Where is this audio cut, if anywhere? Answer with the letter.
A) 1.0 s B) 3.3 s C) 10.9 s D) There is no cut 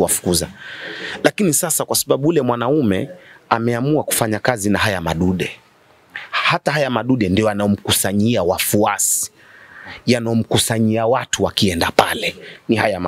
D